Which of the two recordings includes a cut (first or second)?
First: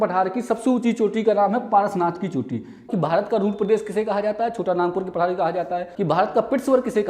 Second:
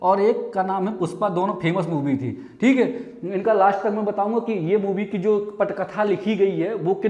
first